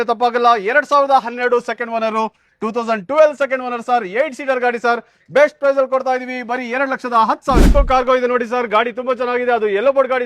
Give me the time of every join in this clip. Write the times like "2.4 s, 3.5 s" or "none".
7.6 s